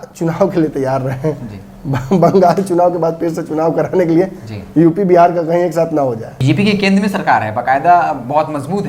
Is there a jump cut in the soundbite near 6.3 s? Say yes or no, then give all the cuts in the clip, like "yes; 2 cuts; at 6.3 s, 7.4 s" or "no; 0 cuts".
yes; 1 cut; at 6.3 s